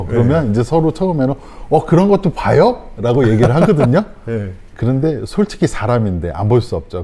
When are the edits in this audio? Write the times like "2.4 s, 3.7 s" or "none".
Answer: none